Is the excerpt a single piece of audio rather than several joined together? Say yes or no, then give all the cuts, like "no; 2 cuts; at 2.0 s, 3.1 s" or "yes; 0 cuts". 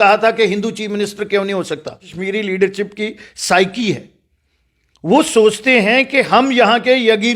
no; 1 cut; at 2.1 s